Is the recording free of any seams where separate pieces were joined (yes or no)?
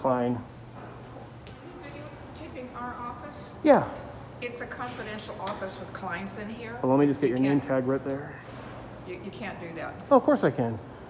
no